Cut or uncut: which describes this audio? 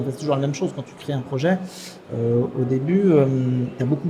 uncut